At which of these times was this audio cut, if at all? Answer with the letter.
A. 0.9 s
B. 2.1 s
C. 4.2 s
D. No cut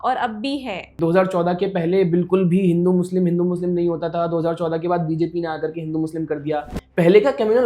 A